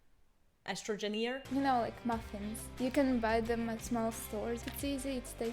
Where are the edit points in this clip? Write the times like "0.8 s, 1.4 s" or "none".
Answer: 1.4 s, 2.6 s, 3.8 s, 4.7 s